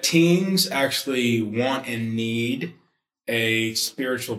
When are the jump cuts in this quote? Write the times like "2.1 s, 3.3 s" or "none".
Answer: none